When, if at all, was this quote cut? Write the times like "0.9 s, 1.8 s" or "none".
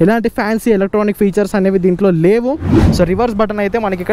2.8 s